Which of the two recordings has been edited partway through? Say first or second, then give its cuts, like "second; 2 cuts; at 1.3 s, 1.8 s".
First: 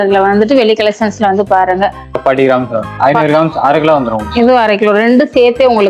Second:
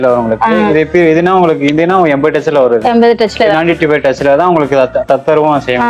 first; 1 cut; at 2.2 s